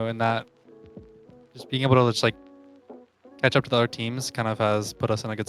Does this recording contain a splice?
no; 0 cuts

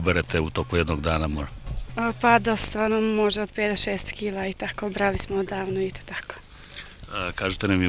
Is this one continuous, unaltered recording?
yes; 0 cuts

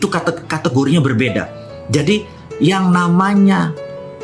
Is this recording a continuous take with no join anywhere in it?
no; 1 cut; at 2.4 s

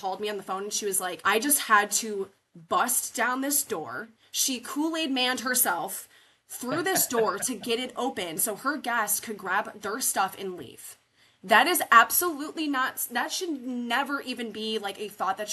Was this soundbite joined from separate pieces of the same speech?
yes; 1 cut; at 1.2 s

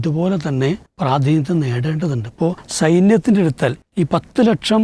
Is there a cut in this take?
yes; 3 cuts; at 0.9 s, 2.6 s, 3.8 s

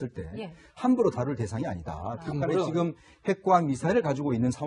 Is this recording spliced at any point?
no; 0 cuts

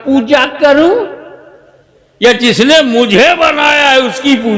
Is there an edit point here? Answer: no; 0 cuts

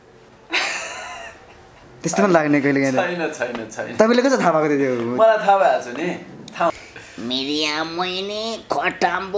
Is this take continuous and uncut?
no; 1 cut; at 6.7 s

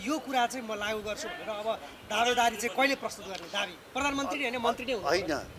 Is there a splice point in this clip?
no; 0 cuts

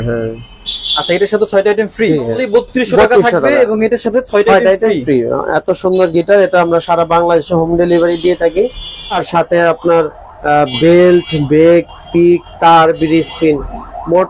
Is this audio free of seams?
no; 2 cuts; at 2.3 s, 9.2 s

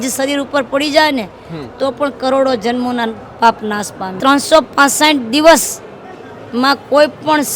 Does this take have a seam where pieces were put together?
yes; 1 cut; at 4.2 s

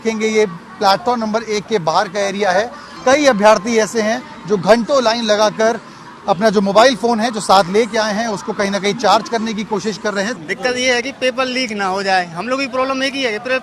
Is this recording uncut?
no; 2 cuts; at 2.9 s, 10.3 s

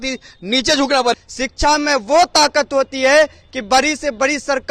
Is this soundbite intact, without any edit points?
no; 1 cut; at 1.2 s

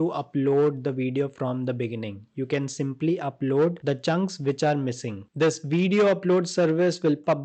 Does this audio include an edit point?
yes; 1 cut; at 5.2 s

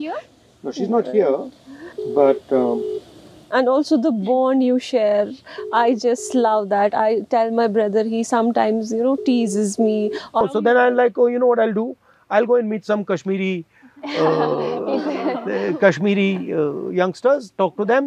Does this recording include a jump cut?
yes; 1 cut; at 10.4 s

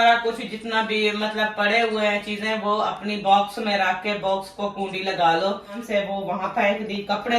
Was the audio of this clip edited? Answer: yes; 1 cut; at 5.8 s

